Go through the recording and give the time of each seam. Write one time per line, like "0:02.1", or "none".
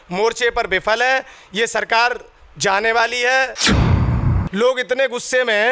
0:04.1